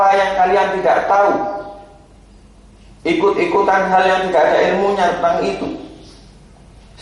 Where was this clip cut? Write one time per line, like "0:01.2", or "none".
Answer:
none